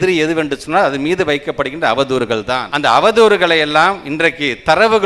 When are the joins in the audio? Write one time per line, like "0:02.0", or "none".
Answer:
0:02.7

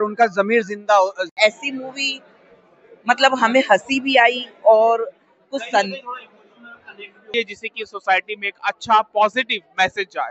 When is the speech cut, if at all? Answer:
0:01.3
0:07.3

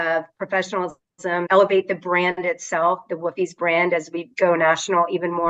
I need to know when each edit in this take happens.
0:01.5

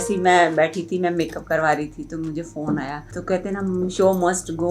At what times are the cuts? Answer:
0:03.1

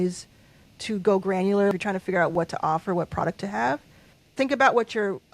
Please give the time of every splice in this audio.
0:01.7
0:04.2

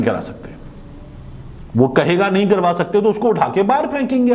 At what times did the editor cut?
none

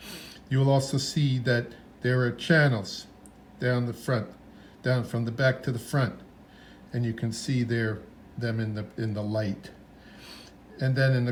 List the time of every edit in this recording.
none

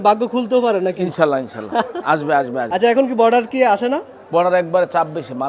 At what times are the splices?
0:02.7

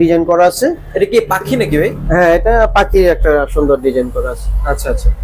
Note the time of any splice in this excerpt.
none

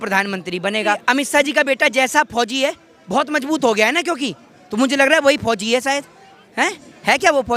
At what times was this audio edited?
0:01.0

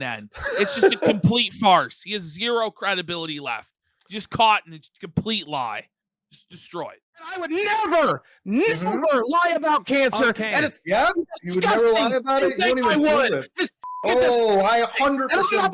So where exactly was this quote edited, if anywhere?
0:07.4

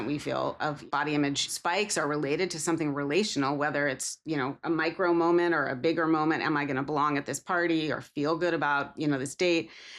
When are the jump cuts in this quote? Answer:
0:00.8
0:01.5

